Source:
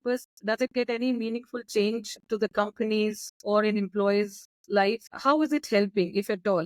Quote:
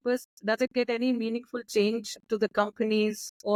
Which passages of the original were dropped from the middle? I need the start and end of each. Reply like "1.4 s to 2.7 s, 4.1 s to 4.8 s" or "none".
none

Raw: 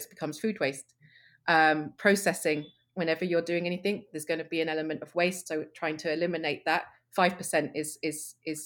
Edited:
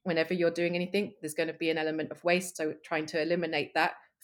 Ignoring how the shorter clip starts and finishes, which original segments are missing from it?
none

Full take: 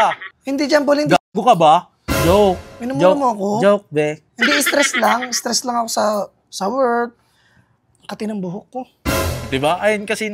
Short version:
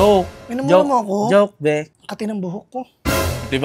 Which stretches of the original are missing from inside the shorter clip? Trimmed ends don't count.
4.3 s to 7.9 s

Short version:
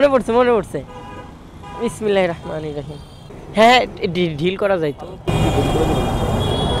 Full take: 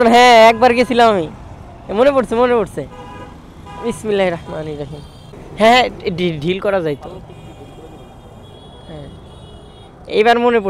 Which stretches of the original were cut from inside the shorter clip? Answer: none

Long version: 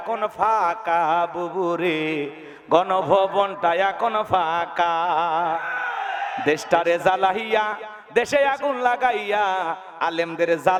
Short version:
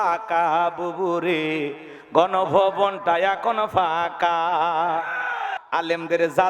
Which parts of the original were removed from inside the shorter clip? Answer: 6.1 s to 9.9 s

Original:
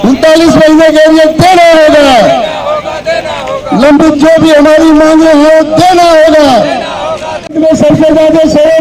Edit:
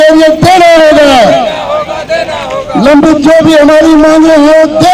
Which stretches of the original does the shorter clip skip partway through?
none

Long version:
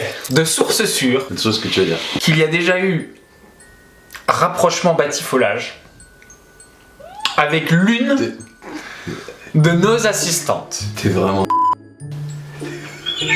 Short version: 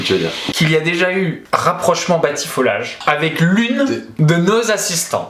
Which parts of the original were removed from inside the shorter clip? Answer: 3.1 s to 4.2 s, 5.7 s to 7.2 s, 8.4 s to 9.4 s

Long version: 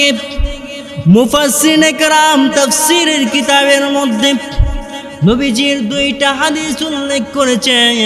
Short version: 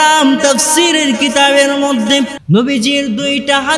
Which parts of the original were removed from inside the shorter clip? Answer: 4.5 s to 5.1 s

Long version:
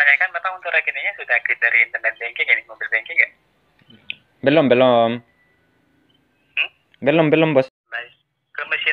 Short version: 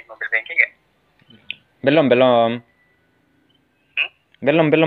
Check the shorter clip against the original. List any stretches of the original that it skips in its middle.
none

